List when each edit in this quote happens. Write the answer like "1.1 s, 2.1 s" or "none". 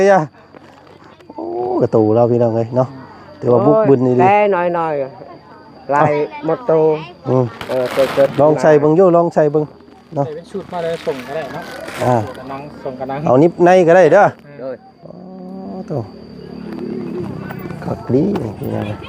none

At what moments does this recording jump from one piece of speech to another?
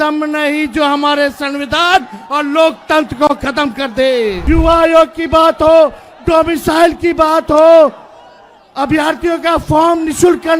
4.4 s

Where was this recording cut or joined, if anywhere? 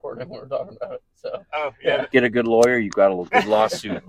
2.0 s

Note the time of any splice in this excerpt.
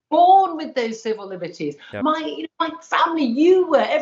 none

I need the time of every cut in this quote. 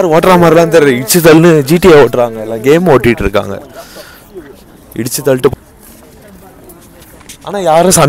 5.5 s

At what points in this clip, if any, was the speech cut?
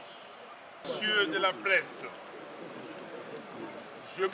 0.9 s

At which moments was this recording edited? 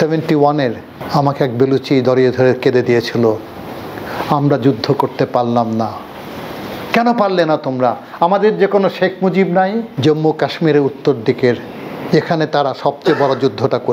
0.9 s, 9.9 s

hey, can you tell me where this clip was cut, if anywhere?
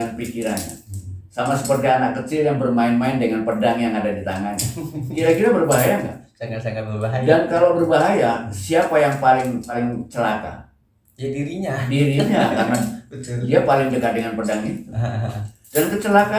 9.8 s

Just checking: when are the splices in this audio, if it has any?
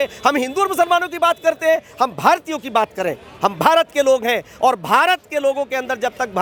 none

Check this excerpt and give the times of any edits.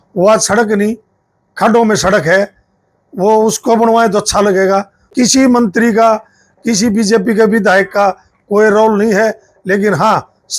5.1 s

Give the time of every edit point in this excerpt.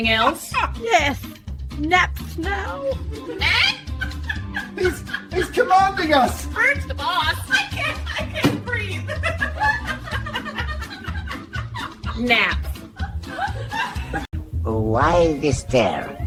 none

